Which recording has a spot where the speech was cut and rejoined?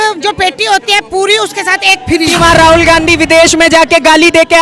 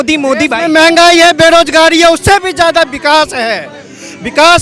first; 1 cut; at 2.3 s

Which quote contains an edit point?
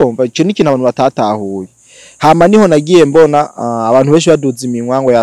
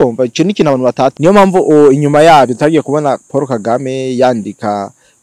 second; 1 cut; at 1.1 s

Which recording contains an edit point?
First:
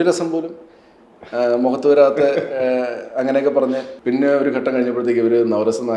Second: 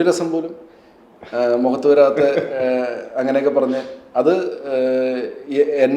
first; 1 cut; at 3.9 s

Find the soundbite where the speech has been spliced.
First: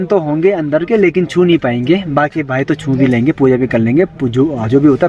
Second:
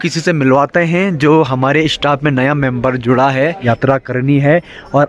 second; 1 cut; at 3.6 s

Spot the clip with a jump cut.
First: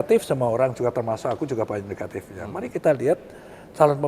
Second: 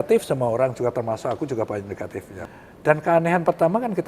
second; 1 cut; at 2.4 s

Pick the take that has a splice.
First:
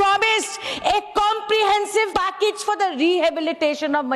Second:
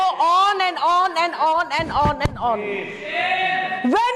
first; 1 cut; at 2.1 s

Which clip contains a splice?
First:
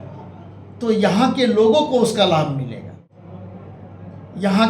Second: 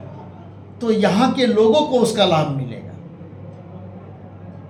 first; 1 cut; at 3.1 s

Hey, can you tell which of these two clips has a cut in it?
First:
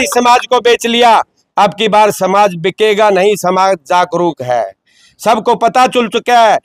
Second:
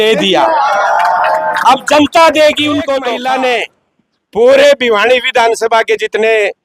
second; 1 cut; at 3.0 s

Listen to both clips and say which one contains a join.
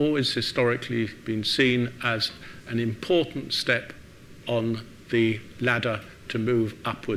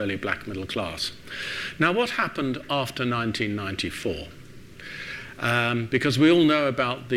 first; 1 cut; at 3.0 s

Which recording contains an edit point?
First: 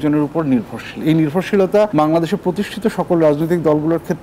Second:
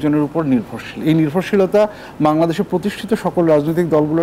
first; 1 cut; at 1.9 s

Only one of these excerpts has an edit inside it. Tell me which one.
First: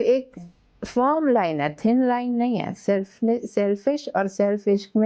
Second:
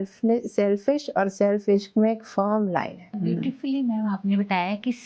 second; 1 cut; at 3.2 s

